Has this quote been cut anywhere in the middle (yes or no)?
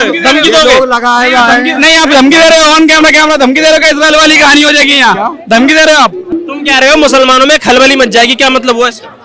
yes